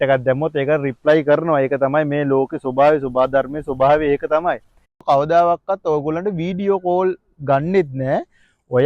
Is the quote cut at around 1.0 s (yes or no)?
no